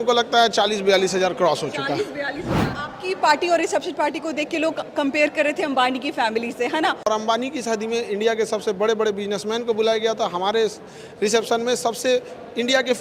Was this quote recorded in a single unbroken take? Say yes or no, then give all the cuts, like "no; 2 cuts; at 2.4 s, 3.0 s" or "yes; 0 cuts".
no; 2 cuts; at 2.7 s, 7.1 s